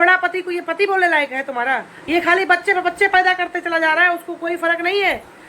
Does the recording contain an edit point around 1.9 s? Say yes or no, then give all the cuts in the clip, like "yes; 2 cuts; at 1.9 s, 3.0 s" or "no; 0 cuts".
yes; 1 cut; at 1.9 s